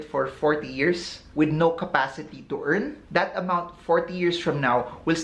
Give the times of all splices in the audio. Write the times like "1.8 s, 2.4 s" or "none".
none